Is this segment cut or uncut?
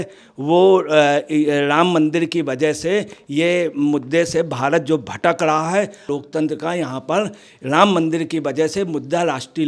cut